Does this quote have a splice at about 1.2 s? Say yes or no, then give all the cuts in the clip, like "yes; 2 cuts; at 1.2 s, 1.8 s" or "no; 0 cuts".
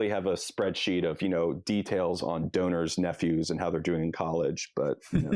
no; 0 cuts